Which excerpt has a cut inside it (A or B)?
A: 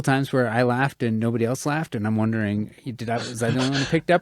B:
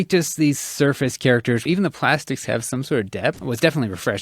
B